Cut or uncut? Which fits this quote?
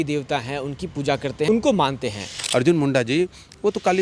cut